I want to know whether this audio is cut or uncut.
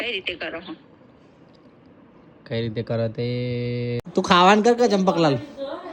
cut